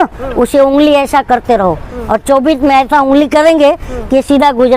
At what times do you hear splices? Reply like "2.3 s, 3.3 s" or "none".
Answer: none